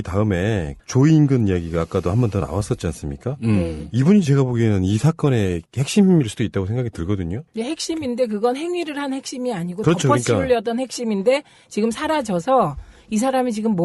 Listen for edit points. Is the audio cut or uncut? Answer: uncut